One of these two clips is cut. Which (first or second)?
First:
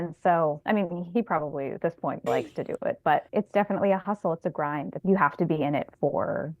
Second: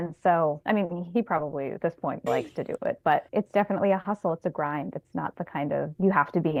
first